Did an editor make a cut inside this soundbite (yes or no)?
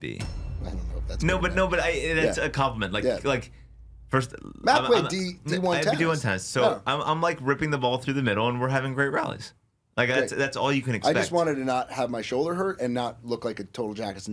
no